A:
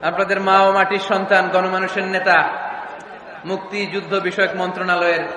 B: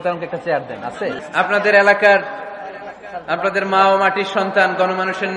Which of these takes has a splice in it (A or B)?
B